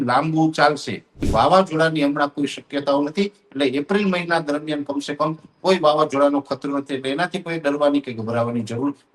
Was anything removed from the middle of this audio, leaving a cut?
yes; 1 cut; at 1.2 s

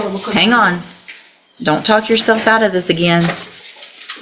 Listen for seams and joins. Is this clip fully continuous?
yes; 0 cuts

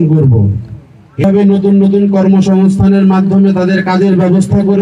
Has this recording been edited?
yes; 1 cut; at 1.2 s

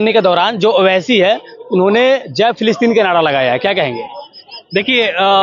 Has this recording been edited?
no; 0 cuts

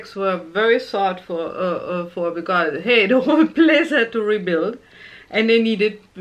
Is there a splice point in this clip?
no; 0 cuts

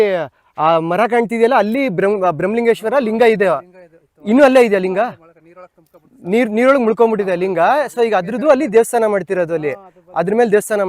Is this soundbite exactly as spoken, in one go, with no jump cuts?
yes; 0 cuts

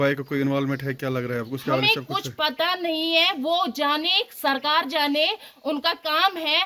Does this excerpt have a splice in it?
no; 0 cuts

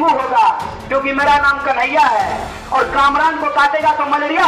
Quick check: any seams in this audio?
no; 0 cuts

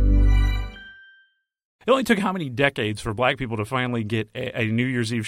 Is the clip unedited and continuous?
no; 1 cut; at 1.7 s

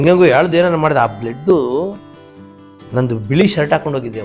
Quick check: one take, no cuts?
yes; 0 cuts

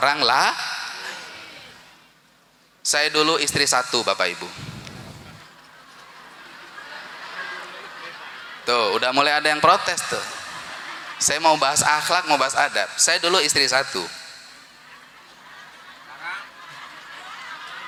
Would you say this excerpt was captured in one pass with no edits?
yes; 0 cuts

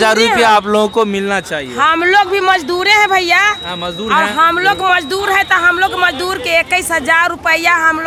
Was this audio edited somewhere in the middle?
no; 0 cuts

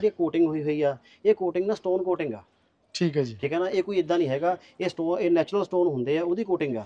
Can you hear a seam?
no; 0 cuts

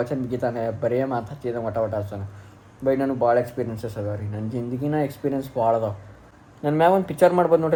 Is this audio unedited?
yes; 0 cuts

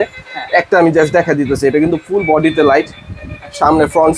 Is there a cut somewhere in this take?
no; 0 cuts

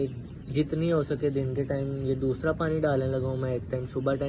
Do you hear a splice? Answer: no; 0 cuts

